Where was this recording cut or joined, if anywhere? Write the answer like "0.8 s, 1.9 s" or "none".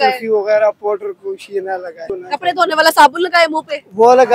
2.1 s